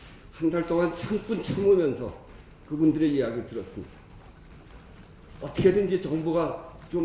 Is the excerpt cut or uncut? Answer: cut